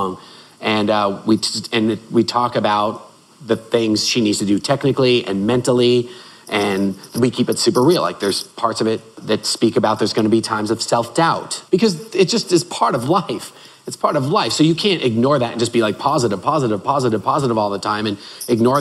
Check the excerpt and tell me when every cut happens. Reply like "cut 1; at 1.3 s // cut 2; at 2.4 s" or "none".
cut 1; at 7.1 s // cut 2; at 9.1 s // cut 3; at 11.6 s